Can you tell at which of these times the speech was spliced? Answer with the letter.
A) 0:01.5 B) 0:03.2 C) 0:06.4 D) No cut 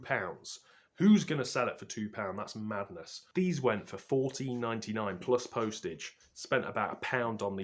B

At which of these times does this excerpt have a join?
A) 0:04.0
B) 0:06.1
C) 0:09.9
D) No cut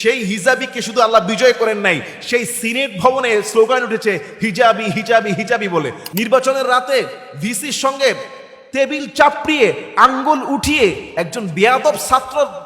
B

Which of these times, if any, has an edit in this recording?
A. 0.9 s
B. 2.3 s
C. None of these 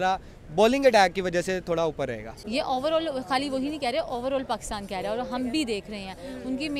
B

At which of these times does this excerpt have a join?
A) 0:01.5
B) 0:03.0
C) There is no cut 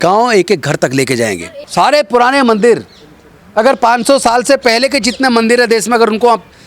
A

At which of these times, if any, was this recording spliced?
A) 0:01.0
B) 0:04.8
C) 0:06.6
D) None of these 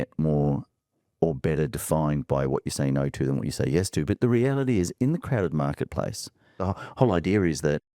C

